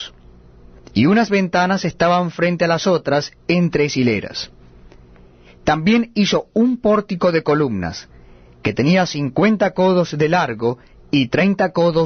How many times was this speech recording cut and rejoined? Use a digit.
0